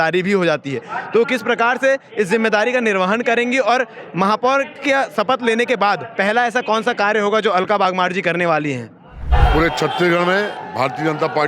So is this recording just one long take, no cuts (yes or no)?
no